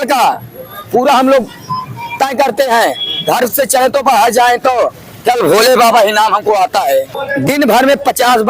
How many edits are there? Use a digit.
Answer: 1